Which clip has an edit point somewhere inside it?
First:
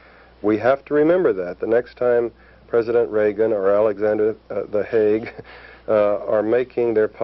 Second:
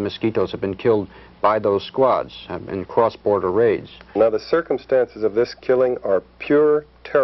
second; 1 cut; at 4.1 s

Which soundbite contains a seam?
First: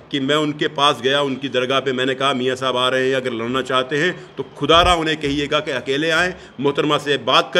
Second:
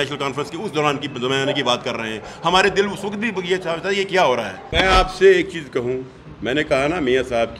second; 1 cut; at 4.7 s

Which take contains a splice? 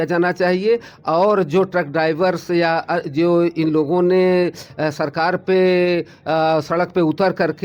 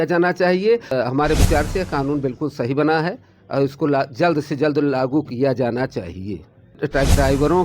second; 2 cuts; at 0.9 s, 6.8 s

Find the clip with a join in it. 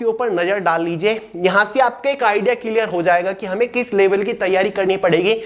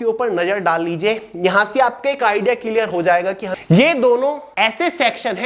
second; 2 cuts; at 3.4 s, 4.4 s

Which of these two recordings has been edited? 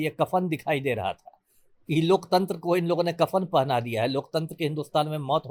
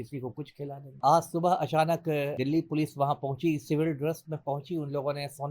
second; 2 cuts; at 1.0 s, 2.4 s

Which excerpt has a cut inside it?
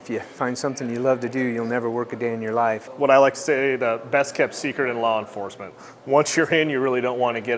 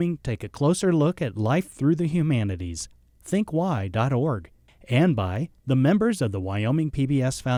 first; 1 cut; at 2.9 s

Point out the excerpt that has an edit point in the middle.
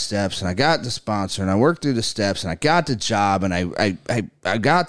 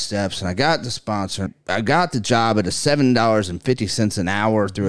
second; 1 cut; at 1.5 s

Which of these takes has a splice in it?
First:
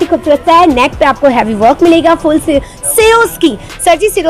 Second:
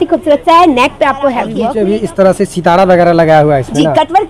second; 1 cut; at 1.5 s

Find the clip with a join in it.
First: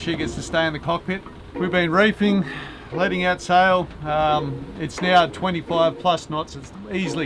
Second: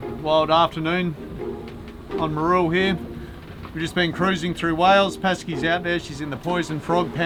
first; 1 cut; at 1.4 s

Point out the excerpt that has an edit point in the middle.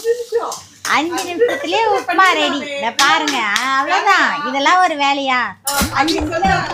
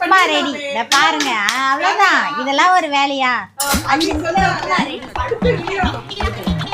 second; 1 cut; at 5.8 s

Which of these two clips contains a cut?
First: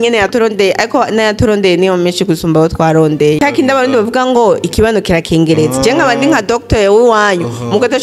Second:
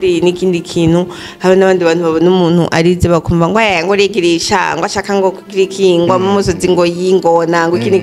first; 1 cut; at 3.4 s

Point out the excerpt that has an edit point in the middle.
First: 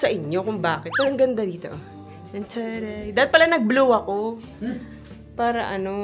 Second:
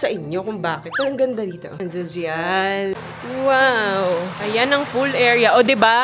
second; 3 cuts; at 1.7 s, 2.9 s, 4.4 s

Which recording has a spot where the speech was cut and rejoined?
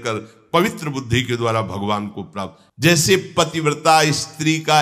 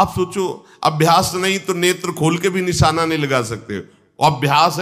first; 1 cut; at 2.6 s

